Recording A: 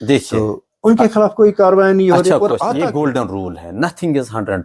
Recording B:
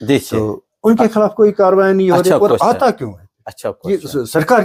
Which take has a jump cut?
A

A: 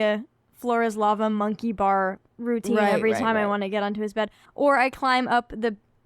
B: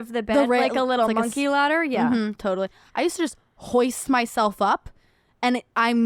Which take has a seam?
A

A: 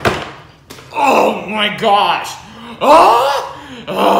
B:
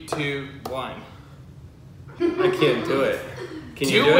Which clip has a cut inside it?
B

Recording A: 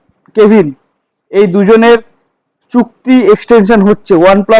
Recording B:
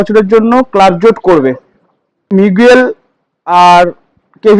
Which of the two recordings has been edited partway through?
B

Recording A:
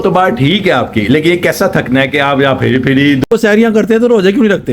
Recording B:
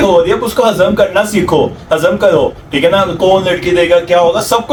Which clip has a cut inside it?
A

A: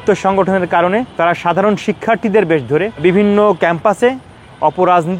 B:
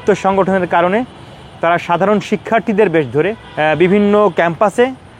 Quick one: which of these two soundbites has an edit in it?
A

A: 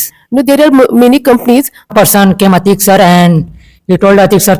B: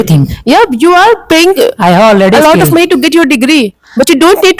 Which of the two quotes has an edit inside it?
A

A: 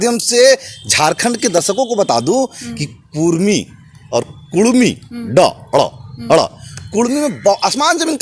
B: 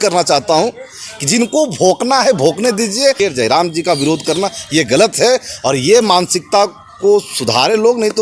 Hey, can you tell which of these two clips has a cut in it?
B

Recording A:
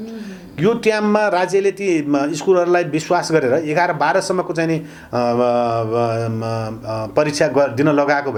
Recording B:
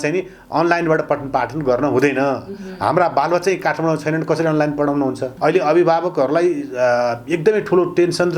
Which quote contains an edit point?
B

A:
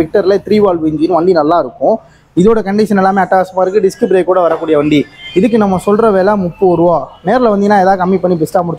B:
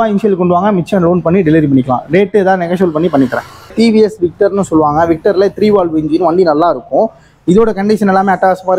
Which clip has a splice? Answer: B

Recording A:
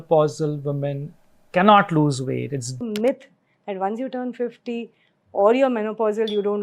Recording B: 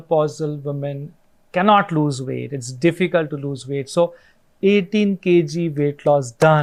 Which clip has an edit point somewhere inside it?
A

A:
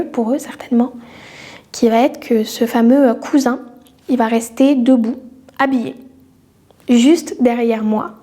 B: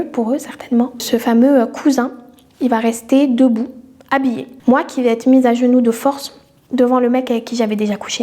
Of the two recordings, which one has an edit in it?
B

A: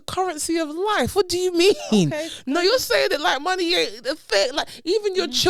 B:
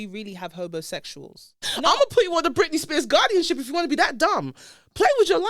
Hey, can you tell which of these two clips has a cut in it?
B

